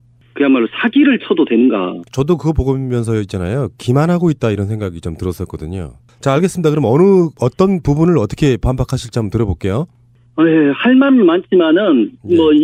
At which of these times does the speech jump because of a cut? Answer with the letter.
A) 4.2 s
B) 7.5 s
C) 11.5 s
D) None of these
D